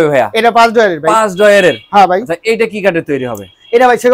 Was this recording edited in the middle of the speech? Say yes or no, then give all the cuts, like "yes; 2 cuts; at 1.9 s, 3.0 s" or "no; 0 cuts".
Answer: no; 0 cuts